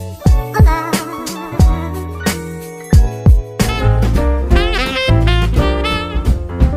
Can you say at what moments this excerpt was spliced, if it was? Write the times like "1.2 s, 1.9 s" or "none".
none